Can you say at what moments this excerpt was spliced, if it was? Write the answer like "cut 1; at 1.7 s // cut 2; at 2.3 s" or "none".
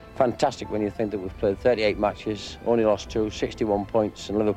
none